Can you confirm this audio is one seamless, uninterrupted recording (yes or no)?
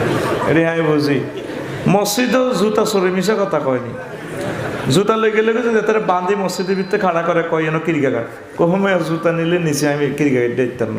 yes